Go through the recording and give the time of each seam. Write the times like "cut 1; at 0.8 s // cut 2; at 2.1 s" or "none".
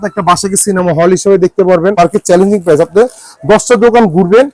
cut 1; at 2.0 s